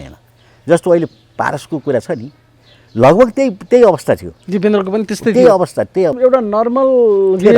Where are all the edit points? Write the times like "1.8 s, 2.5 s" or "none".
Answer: 6.2 s

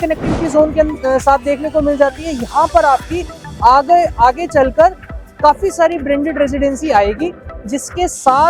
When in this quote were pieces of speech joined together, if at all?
none

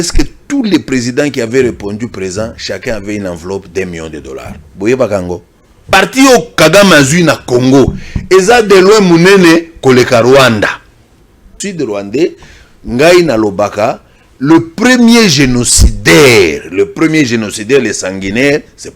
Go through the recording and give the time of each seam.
5.9 s, 11.6 s

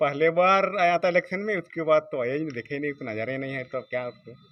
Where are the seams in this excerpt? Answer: none

